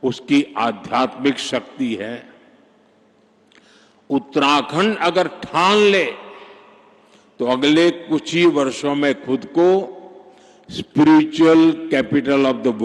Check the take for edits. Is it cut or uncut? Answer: uncut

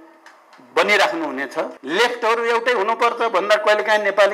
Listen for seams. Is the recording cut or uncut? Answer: cut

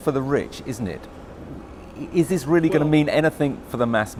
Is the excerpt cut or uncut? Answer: uncut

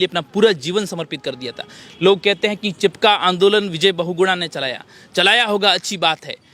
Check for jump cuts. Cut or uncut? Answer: uncut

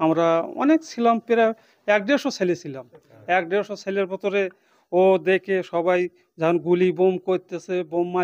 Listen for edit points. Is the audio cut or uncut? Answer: uncut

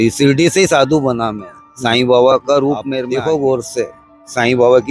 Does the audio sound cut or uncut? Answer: cut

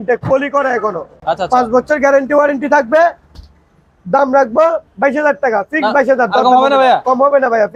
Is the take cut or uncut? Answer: uncut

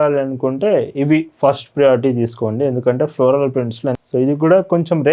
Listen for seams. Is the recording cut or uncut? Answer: cut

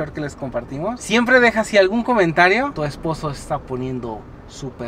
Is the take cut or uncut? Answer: cut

